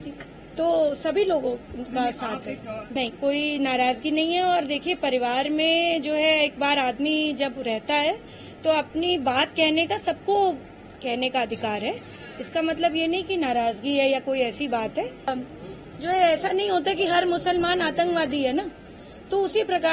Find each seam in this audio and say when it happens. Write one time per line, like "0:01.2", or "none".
0:02.9
0:15.3